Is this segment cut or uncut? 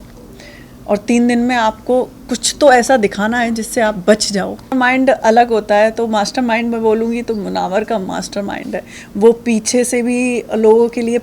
cut